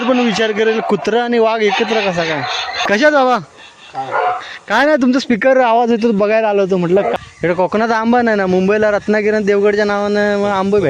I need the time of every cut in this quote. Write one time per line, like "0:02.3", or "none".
0:02.8
0:07.2

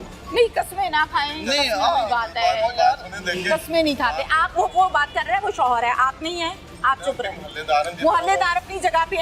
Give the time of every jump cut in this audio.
none

